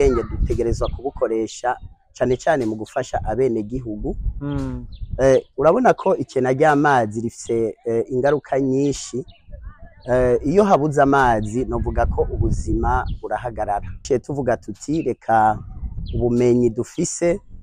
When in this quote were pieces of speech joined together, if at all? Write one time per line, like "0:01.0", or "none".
0:14.0

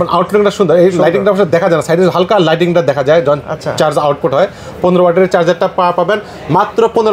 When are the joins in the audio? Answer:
none

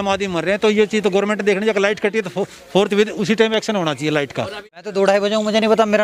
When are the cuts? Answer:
0:04.8

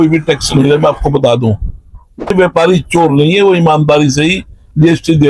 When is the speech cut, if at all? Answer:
0:02.3

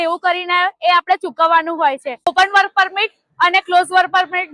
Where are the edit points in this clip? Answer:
0:02.2

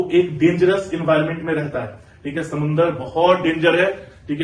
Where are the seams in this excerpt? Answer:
none

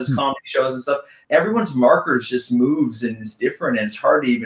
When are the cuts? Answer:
0:01.1

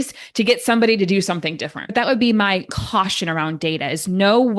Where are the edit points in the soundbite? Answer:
0:01.9
0:02.7

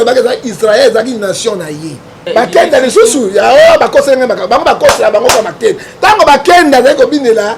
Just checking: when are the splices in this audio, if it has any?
0:02.2

